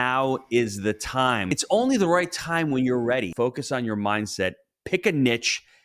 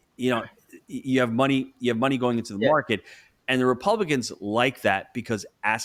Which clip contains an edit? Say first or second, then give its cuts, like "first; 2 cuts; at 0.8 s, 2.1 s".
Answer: first; 2 cuts; at 1.5 s, 3.3 s